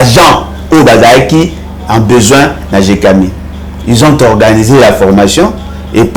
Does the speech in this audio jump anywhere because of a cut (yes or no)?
no